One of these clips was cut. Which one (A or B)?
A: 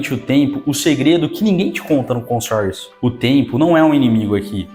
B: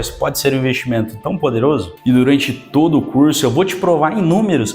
B